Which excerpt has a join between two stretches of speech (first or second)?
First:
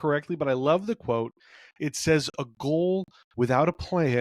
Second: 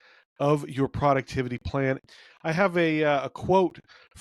second